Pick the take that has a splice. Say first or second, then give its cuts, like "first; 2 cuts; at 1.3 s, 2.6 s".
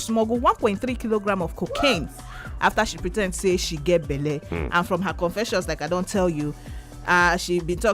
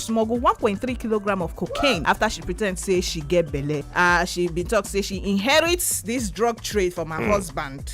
second; 2 cuts; at 2.0 s, 3.9 s